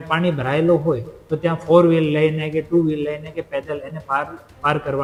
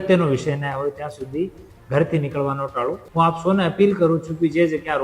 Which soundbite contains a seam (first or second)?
second